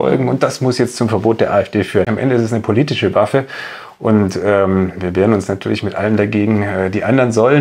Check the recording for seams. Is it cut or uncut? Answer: cut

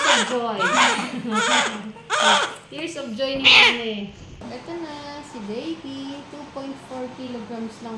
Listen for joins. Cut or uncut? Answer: cut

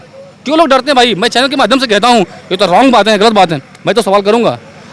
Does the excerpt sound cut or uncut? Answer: uncut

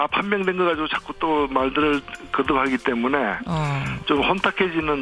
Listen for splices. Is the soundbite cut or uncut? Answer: cut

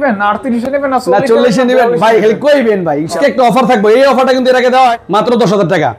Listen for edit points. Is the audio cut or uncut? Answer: cut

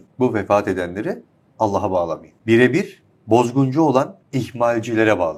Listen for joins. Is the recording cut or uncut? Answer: cut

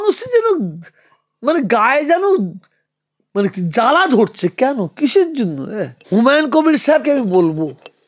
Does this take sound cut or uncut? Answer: cut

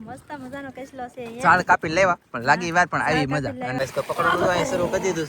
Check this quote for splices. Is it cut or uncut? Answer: cut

